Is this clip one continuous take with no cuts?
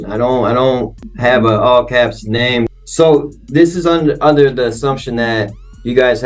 no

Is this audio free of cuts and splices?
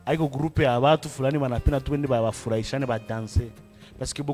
yes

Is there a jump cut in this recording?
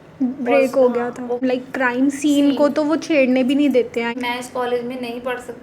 yes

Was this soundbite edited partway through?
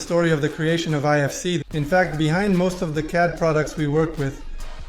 yes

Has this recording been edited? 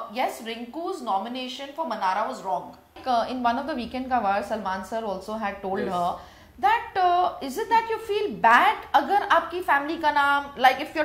yes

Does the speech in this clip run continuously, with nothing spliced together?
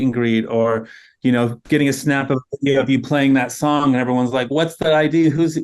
yes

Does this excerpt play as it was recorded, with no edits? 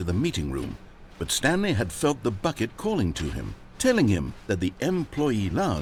yes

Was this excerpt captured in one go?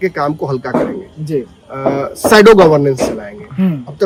yes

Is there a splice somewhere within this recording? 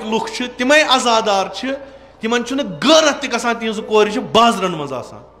no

